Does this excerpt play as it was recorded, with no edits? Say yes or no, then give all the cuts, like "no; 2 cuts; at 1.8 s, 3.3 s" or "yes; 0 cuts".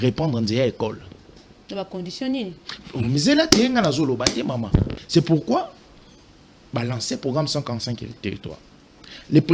no; 1 cut; at 5.0 s